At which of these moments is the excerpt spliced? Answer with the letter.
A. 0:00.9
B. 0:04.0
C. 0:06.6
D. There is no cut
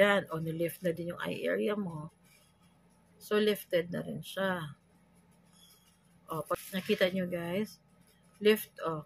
C